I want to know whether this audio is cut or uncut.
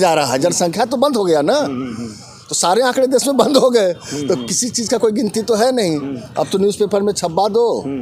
uncut